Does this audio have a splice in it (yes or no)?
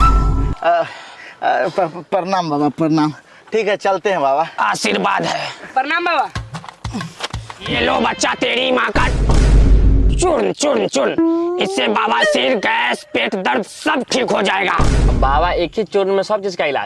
yes